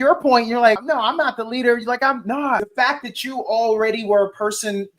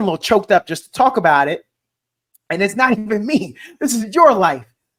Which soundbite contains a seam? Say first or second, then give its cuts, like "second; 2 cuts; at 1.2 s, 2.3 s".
first; 2 cuts; at 0.8 s, 2.7 s